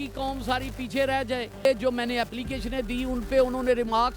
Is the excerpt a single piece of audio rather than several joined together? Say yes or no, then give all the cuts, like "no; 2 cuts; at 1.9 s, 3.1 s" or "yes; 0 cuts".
no; 1 cut; at 1.7 s